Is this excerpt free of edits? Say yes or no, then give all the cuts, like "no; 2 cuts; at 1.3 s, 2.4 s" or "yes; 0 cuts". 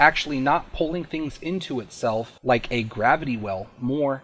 yes; 0 cuts